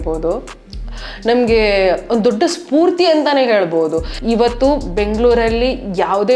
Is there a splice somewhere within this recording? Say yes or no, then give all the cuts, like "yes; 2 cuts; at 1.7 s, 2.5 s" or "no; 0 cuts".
yes; 1 cut; at 4.1 s